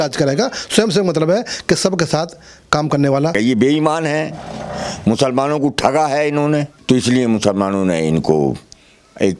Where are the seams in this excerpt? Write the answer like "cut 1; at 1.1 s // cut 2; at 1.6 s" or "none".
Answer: cut 1; at 3.3 s // cut 2; at 6.7 s